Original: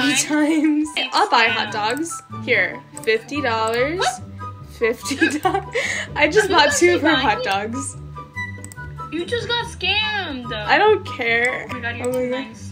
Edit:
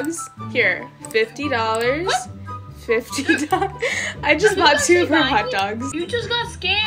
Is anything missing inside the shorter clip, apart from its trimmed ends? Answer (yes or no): yes